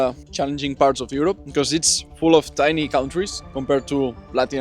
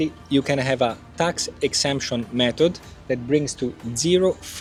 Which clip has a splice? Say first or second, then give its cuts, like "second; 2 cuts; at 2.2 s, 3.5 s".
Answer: first; 2 cuts; at 1.4 s, 3.4 s